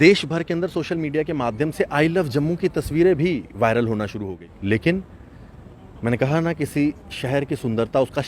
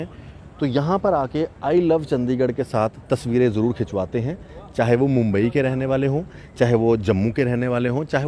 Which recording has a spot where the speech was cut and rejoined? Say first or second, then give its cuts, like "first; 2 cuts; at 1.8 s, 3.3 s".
first; 1 cut; at 4.2 s